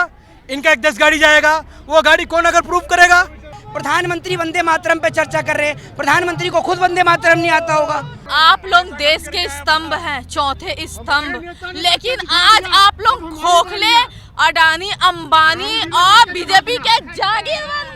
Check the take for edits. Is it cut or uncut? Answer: cut